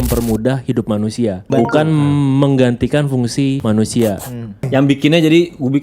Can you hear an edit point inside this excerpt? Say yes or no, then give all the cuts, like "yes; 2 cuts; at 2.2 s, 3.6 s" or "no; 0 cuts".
yes; 3 cuts; at 1.4 s, 3.6 s, 4.7 s